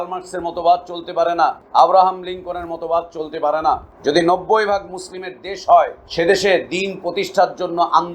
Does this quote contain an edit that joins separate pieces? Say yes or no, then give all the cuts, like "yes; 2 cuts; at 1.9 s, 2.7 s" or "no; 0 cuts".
yes; 3 cuts; at 1.6 s, 3.9 s, 6.0 s